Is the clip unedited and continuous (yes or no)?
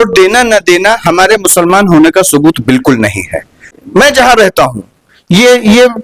no